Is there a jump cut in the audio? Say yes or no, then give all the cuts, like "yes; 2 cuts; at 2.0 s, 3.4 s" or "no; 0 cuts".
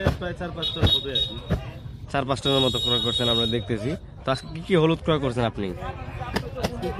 no; 0 cuts